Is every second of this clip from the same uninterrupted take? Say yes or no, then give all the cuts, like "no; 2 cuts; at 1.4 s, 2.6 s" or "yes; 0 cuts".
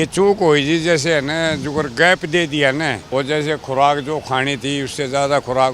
no; 1 cut; at 3.0 s